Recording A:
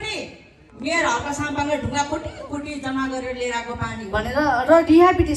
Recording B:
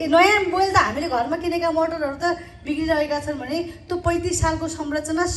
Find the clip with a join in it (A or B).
A